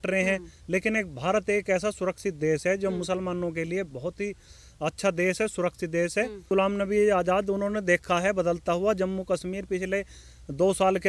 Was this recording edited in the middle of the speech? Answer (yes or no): yes